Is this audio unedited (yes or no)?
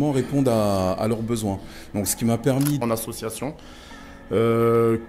no